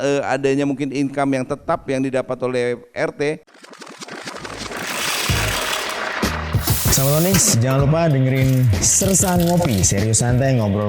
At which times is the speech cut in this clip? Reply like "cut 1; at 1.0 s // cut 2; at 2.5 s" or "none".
cut 1; at 3.5 s